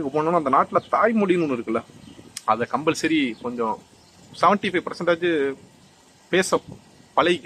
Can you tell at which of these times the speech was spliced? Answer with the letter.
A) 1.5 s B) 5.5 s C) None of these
C